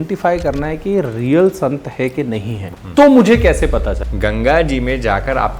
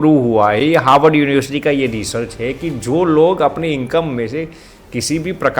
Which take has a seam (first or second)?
first